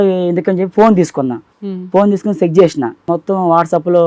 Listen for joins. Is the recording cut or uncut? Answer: cut